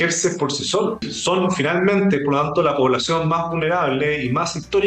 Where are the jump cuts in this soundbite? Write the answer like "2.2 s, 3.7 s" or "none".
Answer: 1.1 s